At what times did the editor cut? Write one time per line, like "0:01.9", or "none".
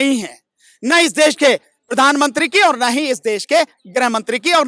none